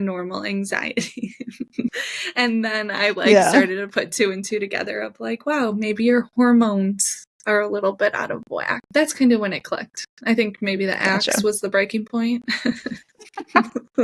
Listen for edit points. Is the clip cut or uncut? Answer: cut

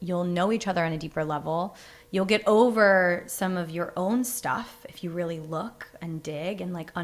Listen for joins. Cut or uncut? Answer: uncut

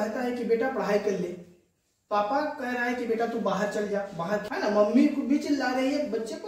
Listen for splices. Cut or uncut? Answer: cut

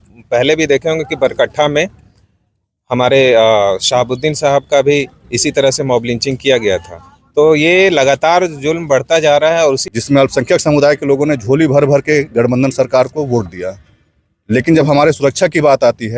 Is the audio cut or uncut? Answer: cut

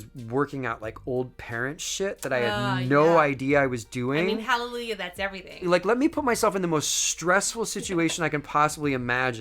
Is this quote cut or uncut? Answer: cut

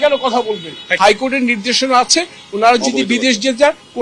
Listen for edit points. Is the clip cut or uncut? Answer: uncut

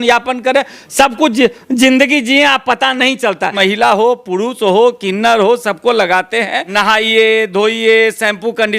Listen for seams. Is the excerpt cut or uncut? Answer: cut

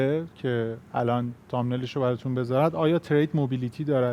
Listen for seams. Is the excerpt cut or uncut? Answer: uncut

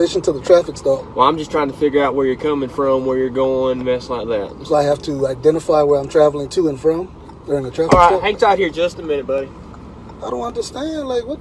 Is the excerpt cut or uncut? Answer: uncut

